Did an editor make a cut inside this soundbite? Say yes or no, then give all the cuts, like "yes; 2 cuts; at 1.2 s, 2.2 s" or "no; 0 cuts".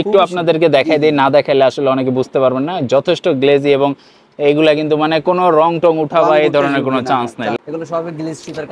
no; 0 cuts